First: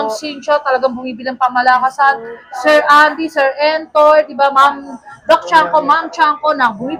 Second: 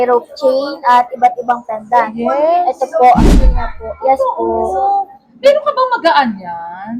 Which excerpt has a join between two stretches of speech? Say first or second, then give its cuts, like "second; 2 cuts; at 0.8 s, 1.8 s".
second; 1 cut; at 3.7 s